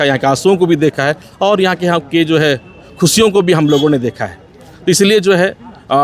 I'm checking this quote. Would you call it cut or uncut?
uncut